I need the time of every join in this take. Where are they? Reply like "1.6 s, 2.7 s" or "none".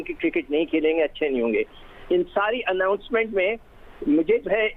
none